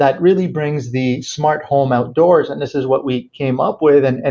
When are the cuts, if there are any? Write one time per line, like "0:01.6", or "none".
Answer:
none